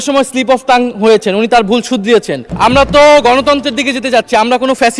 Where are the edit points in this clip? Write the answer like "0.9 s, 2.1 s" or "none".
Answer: 2.4 s